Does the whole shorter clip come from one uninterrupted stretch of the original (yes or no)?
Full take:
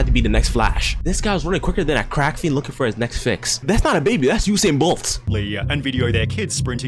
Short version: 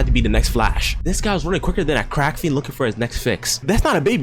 yes